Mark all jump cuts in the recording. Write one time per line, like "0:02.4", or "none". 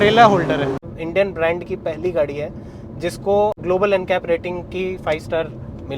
0:01.0
0:03.6